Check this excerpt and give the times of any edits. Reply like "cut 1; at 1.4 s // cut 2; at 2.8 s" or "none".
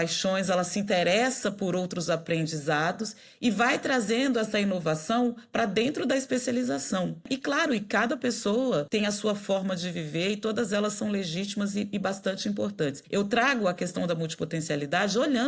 cut 1; at 7.3 s // cut 2; at 8.9 s // cut 3; at 13.0 s